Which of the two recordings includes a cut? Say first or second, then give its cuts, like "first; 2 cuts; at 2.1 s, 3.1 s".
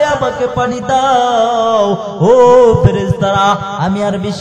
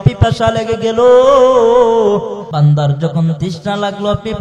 second; 1 cut; at 2.4 s